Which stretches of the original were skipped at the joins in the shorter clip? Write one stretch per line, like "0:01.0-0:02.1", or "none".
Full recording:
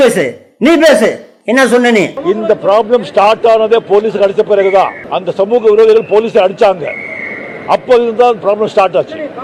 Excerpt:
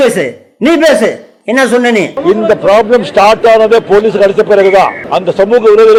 none